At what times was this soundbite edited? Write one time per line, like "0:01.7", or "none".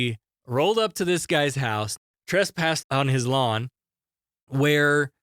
0:01.9